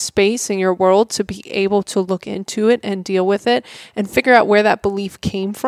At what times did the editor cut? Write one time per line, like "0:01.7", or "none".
none